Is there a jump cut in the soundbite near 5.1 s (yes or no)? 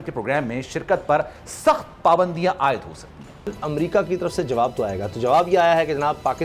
no